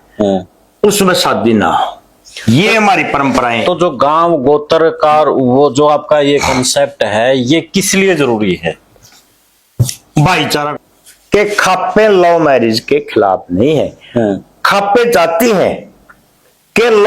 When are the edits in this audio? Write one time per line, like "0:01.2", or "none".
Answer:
0:10.7